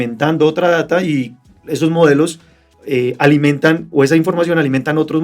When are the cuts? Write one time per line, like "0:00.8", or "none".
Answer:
0:02.7